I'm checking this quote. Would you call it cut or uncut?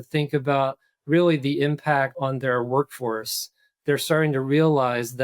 cut